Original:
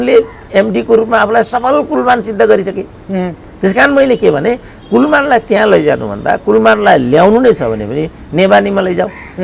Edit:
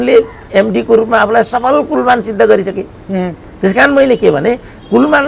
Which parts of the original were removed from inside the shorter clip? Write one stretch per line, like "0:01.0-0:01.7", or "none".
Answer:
none